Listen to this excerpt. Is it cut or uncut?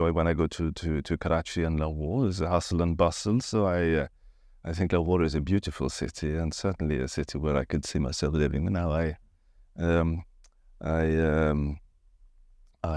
uncut